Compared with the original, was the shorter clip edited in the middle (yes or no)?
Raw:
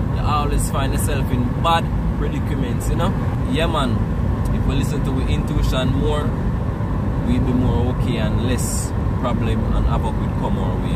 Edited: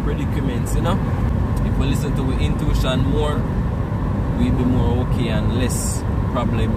yes